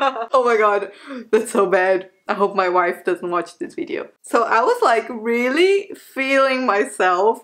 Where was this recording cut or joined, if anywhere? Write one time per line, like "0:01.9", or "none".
0:04.1